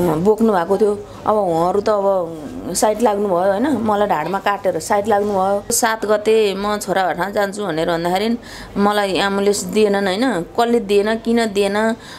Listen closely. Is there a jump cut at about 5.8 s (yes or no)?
yes